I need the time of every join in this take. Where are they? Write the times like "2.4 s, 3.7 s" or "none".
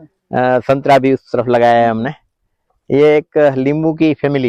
none